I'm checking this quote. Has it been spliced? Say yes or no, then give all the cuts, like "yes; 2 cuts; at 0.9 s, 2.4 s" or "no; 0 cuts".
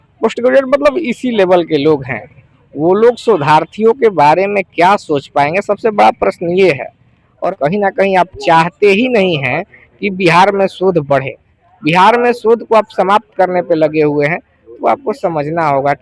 yes; 1 cut; at 7.4 s